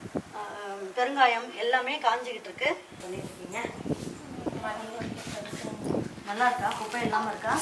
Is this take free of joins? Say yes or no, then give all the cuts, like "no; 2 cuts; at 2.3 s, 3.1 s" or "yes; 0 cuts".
no; 1 cut; at 3.0 s